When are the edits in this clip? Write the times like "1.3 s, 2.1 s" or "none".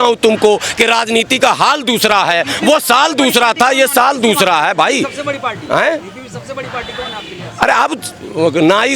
none